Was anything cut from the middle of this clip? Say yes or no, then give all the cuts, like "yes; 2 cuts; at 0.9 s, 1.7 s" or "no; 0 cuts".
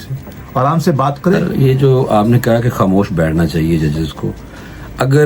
yes; 1 cut; at 1.4 s